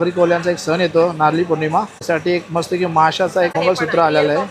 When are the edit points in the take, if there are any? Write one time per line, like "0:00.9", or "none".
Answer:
0:02.0
0:03.5